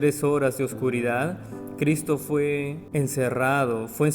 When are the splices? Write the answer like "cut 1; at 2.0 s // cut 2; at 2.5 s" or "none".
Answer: cut 1; at 2.8 s

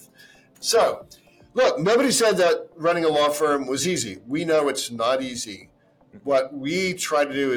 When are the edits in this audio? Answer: none

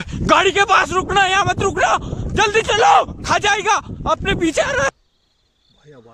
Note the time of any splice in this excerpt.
cut 1; at 4.9 s

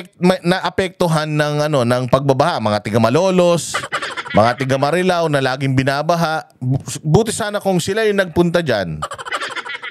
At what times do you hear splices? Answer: none

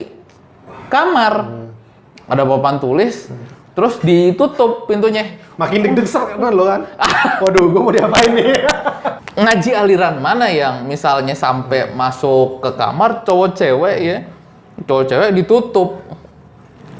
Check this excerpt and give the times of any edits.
cut 1; at 9.1 s

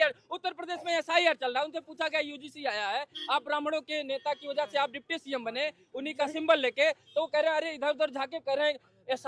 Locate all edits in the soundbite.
none

